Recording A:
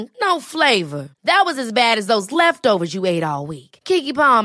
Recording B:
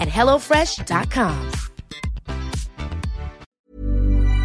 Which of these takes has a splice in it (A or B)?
B